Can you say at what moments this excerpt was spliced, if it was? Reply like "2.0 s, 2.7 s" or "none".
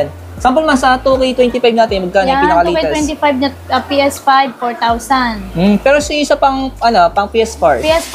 none